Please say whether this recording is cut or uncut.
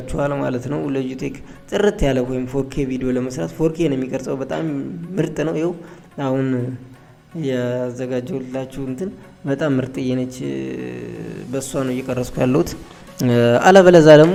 uncut